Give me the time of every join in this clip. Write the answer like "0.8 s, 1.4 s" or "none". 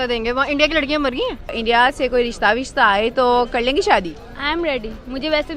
1.6 s